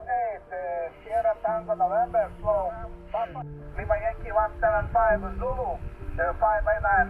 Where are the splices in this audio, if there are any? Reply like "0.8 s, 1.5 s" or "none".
3.4 s